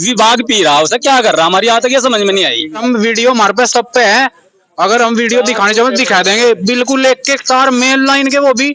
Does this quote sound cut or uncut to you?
cut